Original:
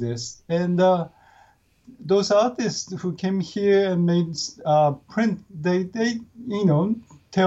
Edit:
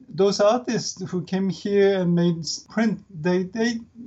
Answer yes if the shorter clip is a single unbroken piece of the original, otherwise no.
no